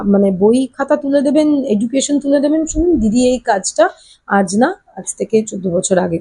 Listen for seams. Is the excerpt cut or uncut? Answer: uncut